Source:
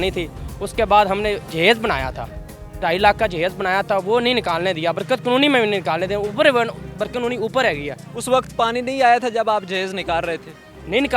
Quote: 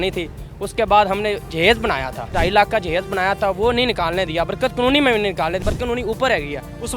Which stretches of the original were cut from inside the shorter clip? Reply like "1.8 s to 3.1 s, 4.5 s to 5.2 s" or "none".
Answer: 2.2 s to 2.6 s, 6.1 s to 6.9 s